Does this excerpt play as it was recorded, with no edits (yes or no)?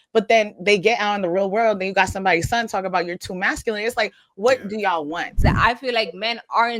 no